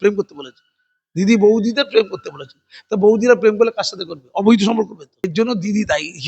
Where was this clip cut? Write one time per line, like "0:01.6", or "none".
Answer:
0:05.3

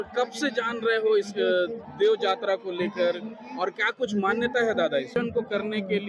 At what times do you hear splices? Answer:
0:05.1

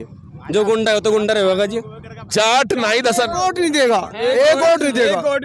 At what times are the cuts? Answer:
0:02.1

